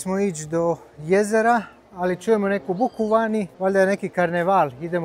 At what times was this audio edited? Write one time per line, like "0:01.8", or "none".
0:03.5